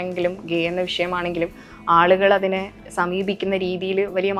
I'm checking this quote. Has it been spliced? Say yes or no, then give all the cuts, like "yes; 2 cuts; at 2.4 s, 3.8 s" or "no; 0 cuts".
no; 0 cuts